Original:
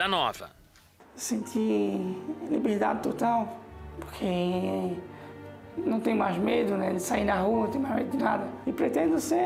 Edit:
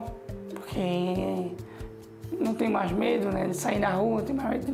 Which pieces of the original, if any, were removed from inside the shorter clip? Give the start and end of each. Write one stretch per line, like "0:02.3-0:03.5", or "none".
none